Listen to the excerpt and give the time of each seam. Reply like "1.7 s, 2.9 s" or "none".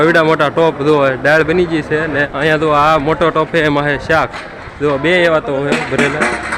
2.3 s, 4.6 s